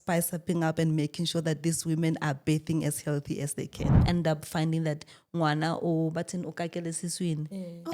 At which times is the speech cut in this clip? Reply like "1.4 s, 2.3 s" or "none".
4.0 s